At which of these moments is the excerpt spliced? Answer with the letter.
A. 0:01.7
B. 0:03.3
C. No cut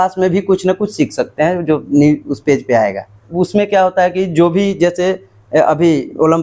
B